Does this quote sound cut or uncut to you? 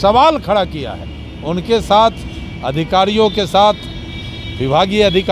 uncut